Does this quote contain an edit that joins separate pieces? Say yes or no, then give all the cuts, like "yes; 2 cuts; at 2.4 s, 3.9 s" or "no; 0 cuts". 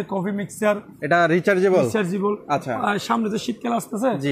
no; 0 cuts